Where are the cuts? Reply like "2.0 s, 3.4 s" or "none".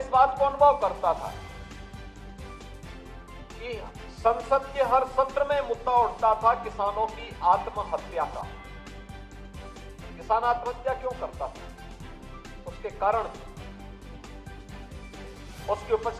1.8 s, 3.6 s, 13.3 s, 15.0 s